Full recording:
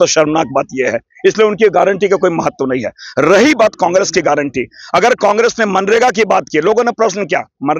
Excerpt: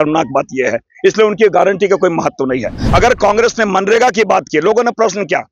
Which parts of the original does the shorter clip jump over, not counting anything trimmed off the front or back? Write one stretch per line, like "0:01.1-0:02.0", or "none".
0:03.0-0:04.8